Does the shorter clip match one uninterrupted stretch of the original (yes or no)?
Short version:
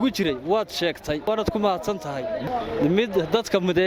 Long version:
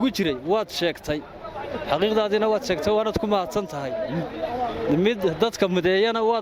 no